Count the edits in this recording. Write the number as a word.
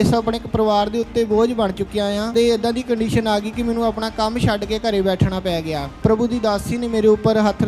two